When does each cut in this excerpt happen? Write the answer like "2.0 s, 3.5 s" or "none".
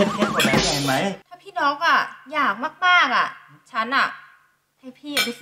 1.2 s

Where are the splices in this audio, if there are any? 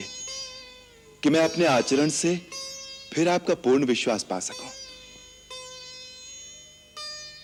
none

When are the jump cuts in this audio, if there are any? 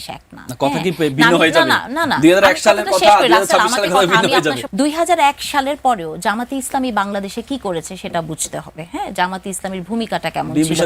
none

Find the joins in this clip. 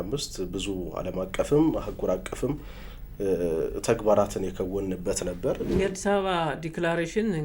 5.7 s

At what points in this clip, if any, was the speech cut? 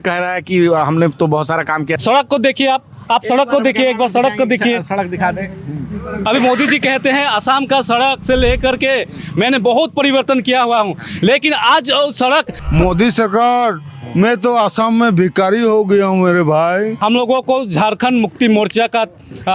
2.0 s, 6.2 s, 12.6 s, 17.0 s

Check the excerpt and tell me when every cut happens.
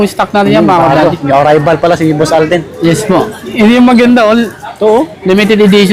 none

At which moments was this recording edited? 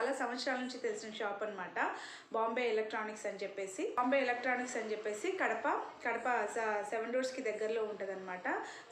4.0 s

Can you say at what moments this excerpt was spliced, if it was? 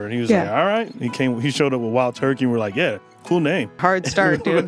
3.8 s

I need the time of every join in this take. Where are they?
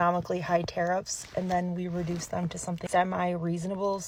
none

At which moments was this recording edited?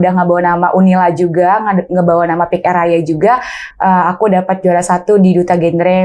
3.6 s

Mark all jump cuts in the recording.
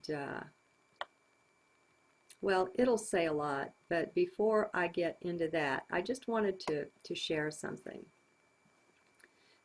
7.4 s

